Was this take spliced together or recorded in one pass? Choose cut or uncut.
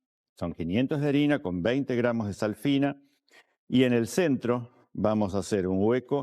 uncut